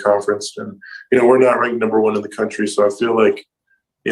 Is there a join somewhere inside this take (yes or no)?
no